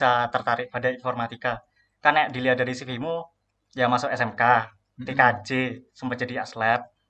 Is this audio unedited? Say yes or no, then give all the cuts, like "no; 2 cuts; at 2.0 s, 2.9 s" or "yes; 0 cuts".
yes; 0 cuts